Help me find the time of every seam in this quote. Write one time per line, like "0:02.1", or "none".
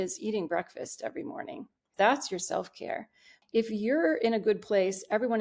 0:01.8
0:03.3

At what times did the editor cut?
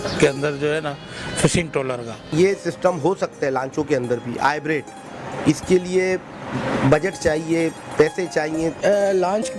0:02.2
0:08.8

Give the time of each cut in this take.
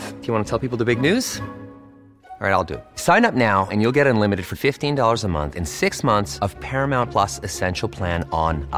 none

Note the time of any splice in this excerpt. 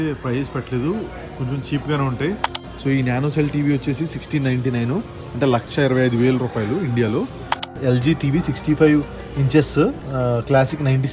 0:02.6
0:07.7

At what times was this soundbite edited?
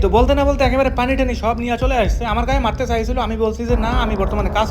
none

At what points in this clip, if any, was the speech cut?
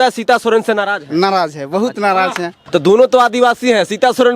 0:02.6

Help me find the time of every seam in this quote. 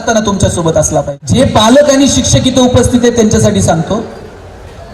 0:01.2

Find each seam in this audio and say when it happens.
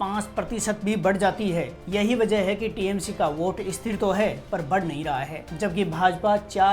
0:01.8
0:05.4

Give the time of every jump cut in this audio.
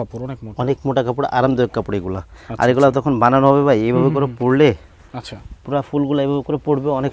none

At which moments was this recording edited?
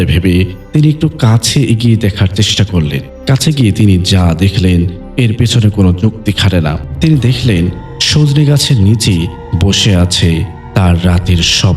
0:03.1
0:06.8

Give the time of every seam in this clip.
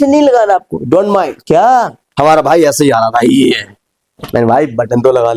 0:02.0

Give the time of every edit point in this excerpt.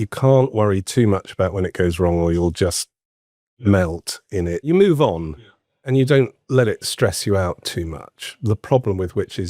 0:04.6
0:05.8

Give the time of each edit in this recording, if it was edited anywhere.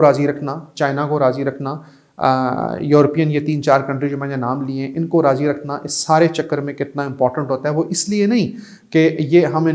none

